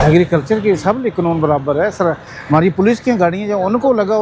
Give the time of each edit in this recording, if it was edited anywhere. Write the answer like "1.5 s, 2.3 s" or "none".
none